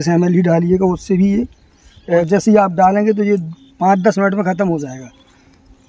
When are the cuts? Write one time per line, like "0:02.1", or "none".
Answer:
0:02.3